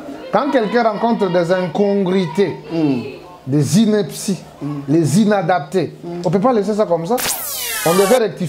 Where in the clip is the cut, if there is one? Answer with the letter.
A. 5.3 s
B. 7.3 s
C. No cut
B